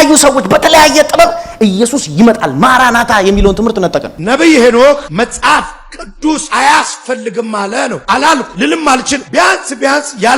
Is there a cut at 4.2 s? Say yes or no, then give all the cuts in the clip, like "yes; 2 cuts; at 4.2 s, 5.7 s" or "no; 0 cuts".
yes; 1 cut; at 4.2 s